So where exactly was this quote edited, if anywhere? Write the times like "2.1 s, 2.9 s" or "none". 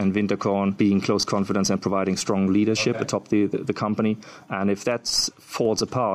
none